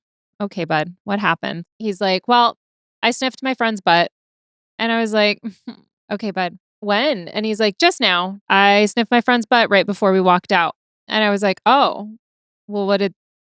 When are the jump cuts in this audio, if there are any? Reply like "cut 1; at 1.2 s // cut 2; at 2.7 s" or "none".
cut 1; at 1.6 s // cut 2; at 5.9 s // cut 3; at 6.7 s // cut 4; at 8.4 s